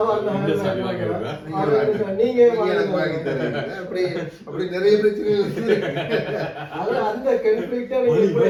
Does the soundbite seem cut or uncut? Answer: uncut